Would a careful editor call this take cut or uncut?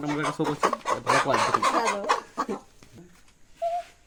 uncut